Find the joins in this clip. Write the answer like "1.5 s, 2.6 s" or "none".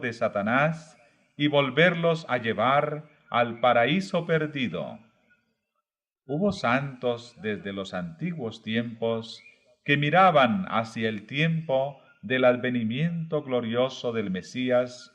4.5 s